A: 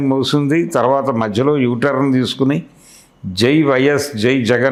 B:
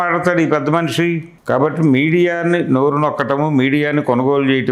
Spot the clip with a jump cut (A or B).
B